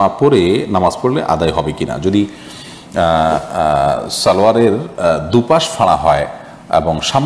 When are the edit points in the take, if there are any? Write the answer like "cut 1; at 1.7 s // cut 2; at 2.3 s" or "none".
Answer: none

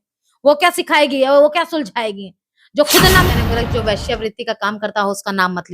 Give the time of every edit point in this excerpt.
cut 1; at 3.3 s

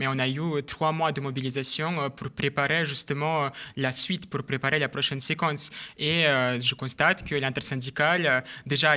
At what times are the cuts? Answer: none

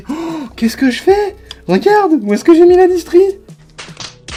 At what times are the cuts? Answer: none

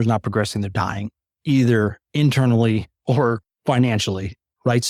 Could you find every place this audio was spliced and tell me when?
none

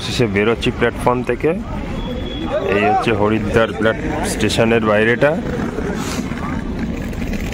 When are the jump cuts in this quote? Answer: none

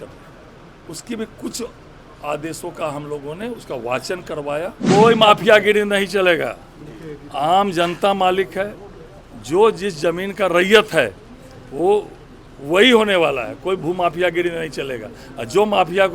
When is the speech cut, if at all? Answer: cut 1; at 4.8 s

